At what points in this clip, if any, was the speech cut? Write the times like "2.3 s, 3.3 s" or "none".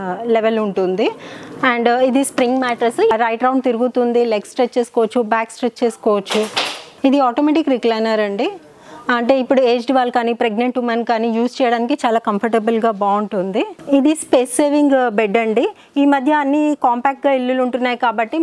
3.1 s, 13.8 s

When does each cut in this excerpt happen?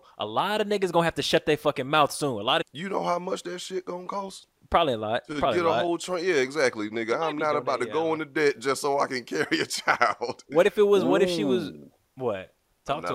2.6 s

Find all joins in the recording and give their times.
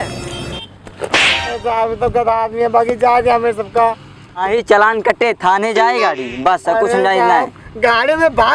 4.4 s

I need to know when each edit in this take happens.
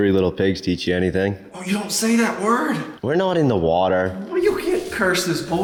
none

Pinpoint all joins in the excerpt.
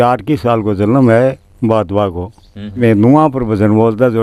2.8 s

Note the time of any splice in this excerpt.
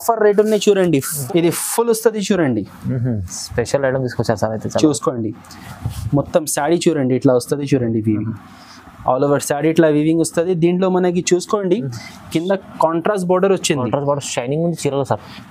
1.1 s

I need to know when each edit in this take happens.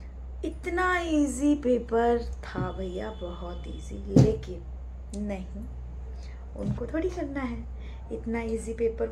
none

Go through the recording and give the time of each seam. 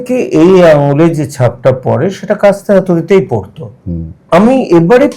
4.2 s

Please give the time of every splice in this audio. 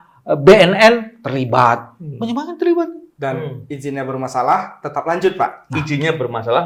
none

